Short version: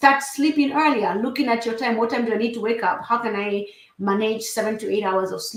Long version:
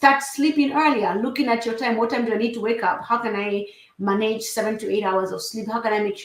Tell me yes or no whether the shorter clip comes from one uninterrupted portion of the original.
yes